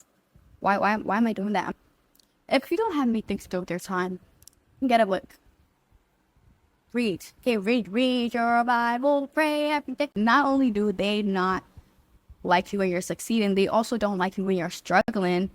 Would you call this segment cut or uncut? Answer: uncut